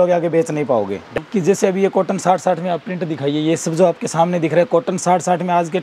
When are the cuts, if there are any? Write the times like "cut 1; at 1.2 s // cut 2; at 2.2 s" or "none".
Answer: cut 1; at 1.1 s